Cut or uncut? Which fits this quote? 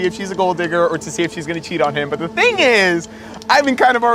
uncut